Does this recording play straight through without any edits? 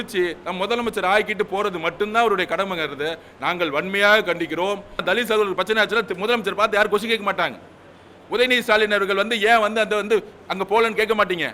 no; 1 cut; at 5.0 s

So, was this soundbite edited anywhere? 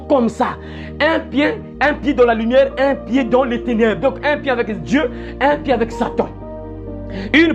no; 0 cuts

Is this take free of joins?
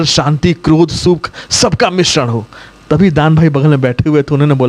yes; 0 cuts

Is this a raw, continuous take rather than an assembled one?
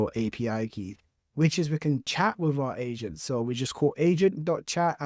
no; 1 cut; at 1.2 s

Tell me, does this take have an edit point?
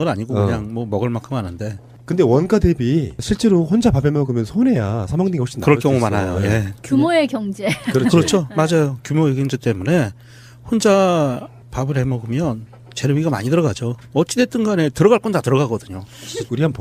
no; 0 cuts

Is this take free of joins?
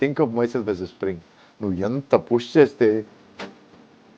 yes; 0 cuts

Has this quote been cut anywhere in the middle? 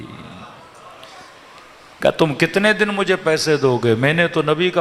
no; 0 cuts

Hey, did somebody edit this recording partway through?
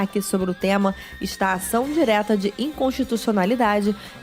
no; 0 cuts

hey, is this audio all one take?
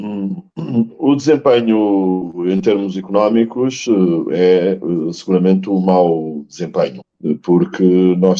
no; 1 cut; at 7.1 s

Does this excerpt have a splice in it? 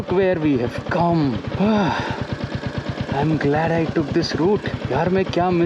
yes; 2 cuts; at 1.5 s, 4.7 s

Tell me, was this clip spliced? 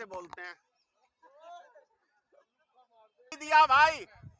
yes; 1 cut; at 3.4 s

